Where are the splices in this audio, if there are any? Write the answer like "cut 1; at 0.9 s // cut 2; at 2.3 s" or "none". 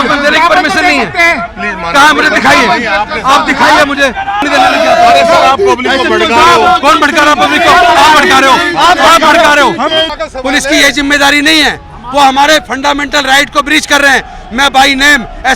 cut 1; at 4.4 s // cut 2; at 10.1 s